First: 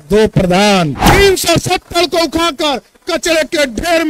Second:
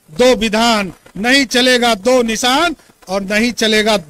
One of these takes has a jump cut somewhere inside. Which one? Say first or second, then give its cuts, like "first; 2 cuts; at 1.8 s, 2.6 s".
first; 1 cut; at 1.0 s